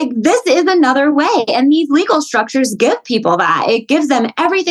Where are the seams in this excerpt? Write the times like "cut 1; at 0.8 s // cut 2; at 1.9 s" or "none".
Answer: none